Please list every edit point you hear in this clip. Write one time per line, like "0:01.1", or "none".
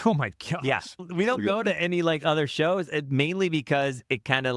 0:01.0

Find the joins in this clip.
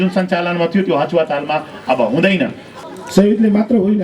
0:02.7

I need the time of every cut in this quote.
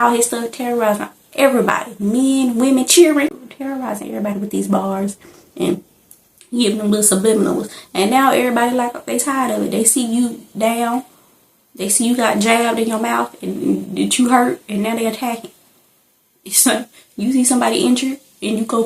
0:03.3

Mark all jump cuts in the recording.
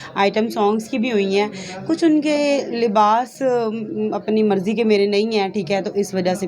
none

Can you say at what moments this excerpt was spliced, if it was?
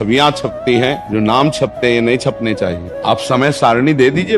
0:01.0
0:02.9

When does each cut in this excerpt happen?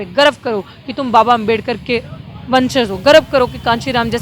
none

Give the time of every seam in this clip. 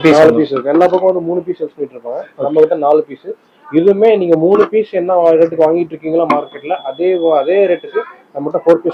none

